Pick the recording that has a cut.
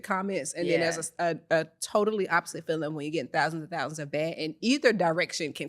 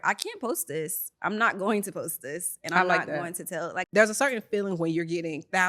second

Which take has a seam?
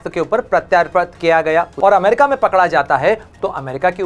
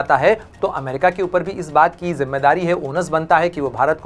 first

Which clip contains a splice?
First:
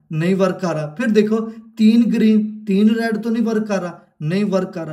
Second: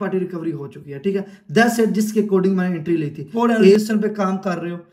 second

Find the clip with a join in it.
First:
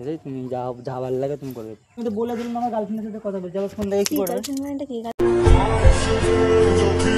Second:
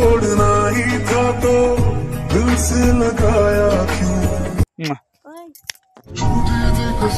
first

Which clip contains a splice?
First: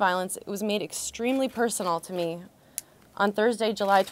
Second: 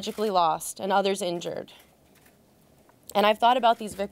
second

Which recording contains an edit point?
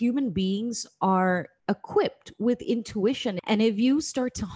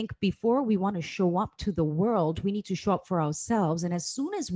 first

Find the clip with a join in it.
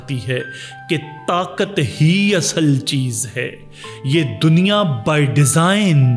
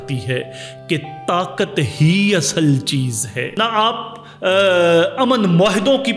second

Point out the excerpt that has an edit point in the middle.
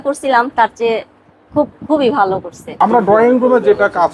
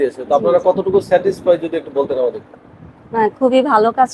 first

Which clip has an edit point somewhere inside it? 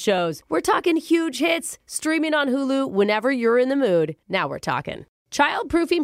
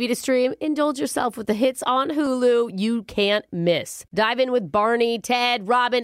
first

